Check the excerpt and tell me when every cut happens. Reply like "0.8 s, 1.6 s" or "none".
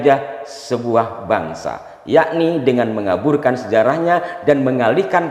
none

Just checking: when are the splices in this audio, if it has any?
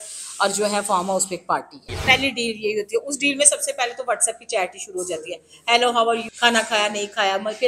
1.9 s, 6.2 s

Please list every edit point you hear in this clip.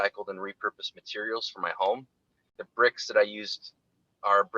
2.6 s

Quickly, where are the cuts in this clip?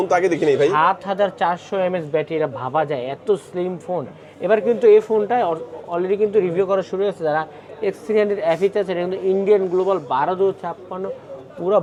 none

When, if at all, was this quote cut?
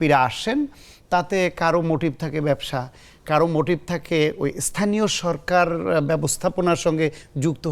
none

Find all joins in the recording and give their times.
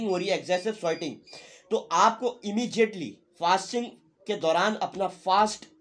none

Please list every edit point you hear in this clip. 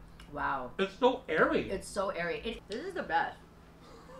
2.5 s

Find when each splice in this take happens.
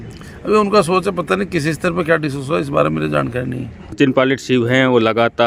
3.9 s

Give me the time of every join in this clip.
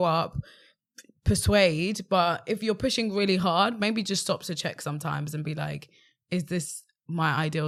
none

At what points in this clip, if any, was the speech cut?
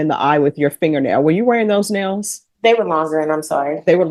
none

